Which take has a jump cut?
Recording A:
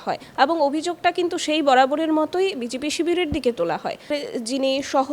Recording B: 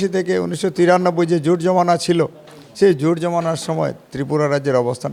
A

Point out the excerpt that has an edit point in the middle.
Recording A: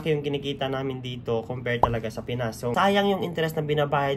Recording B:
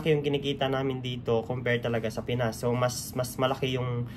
A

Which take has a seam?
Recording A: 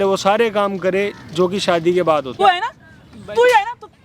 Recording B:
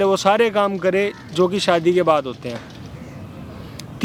A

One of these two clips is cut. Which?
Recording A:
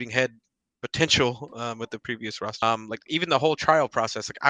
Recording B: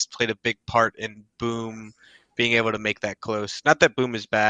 A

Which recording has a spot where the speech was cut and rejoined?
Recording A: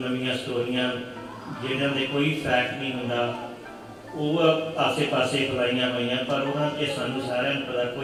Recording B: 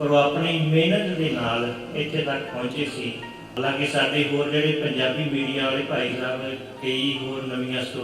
B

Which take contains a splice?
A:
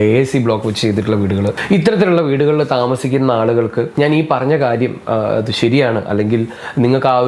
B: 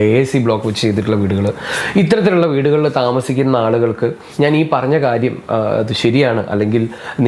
A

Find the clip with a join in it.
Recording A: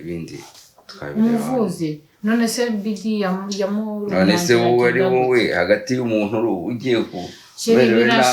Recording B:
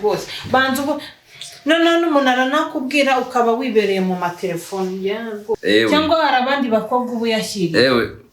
B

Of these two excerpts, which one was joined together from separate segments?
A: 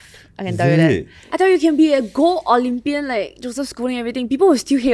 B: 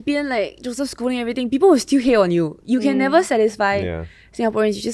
A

